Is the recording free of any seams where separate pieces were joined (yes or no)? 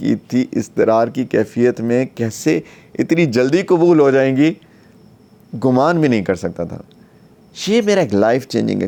yes